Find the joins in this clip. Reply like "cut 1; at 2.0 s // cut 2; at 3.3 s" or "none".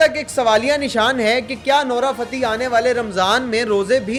none